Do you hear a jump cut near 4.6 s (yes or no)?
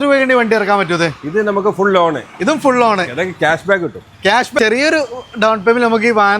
yes